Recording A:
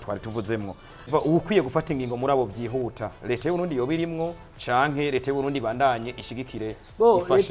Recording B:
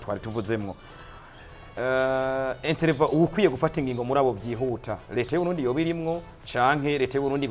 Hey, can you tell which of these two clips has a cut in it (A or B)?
A